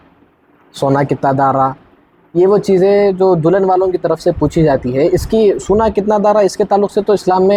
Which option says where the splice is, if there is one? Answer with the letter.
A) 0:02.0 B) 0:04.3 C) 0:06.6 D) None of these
D